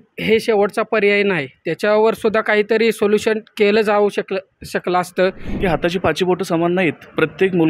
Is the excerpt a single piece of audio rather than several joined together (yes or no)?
no